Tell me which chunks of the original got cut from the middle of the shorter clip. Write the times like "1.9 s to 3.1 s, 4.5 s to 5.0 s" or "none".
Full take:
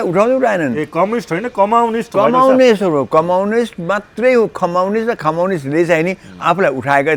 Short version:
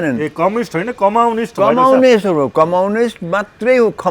none

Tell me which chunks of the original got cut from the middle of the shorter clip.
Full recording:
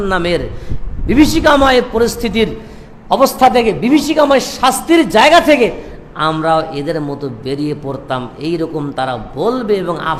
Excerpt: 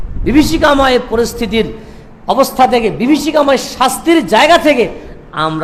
none

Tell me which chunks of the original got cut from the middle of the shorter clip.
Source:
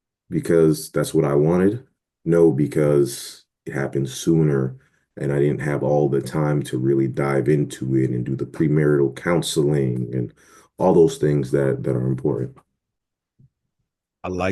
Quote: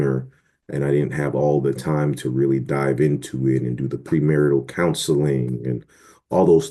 none

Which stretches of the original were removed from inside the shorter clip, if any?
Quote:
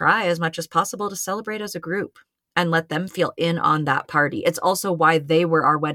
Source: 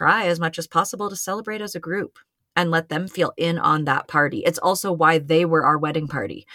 none

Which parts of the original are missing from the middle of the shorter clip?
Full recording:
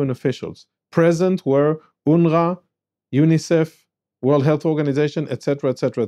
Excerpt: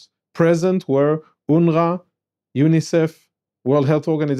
none

